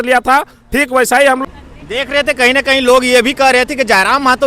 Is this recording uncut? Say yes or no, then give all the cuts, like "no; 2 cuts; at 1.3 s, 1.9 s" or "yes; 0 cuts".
no; 1 cut; at 1.4 s